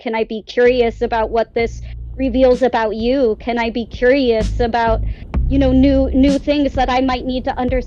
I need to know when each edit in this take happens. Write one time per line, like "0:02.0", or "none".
none